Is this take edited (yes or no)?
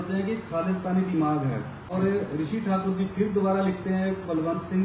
yes